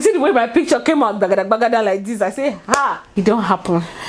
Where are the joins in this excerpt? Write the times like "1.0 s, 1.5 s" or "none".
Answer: 3.2 s